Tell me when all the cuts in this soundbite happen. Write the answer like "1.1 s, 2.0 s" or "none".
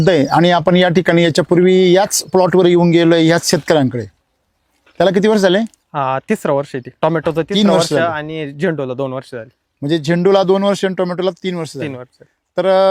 none